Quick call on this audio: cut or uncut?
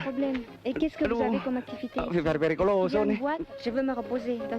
cut